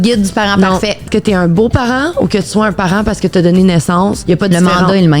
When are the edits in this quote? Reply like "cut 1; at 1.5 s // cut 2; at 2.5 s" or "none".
cut 1; at 1.0 s // cut 2; at 4.2 s

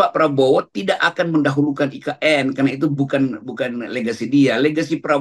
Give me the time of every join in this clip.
none

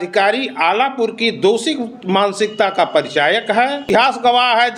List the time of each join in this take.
cut 1; at 3.8 s

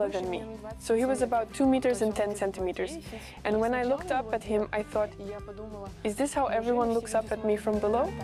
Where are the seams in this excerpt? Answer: none

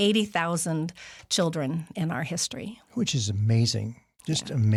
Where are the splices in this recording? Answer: none

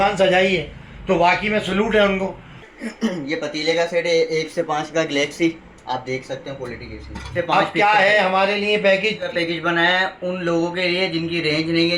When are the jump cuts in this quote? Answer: cut 1; at 2.6 s // cut 2; at 7.3 s // cut 3; at 9.3 s

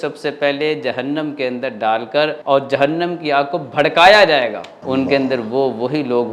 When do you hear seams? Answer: cut 1; at 2.4 s // cut 2; at 4.7 s

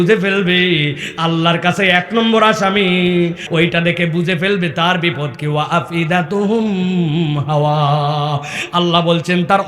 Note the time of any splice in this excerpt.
cut 1; at 3.4 s

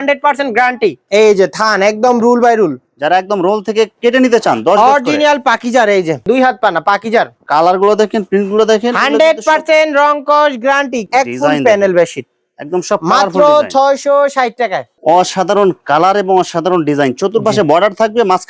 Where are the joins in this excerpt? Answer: cut 1; at 1.0 s // cut 2; at 6.2 s // cut 3; at 11.0 s // cut 4; at 14.9 s

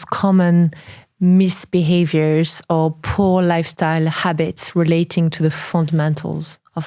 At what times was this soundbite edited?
none

